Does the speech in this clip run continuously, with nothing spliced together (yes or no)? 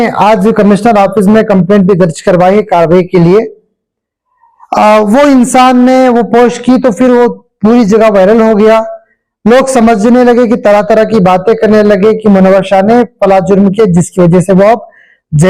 yes